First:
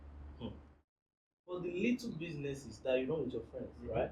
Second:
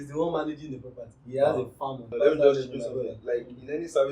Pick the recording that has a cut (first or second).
second